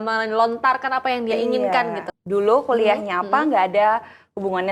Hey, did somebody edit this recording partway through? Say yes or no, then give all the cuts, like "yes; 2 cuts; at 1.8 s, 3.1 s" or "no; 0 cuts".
yes; 1 cut; at 2.1 s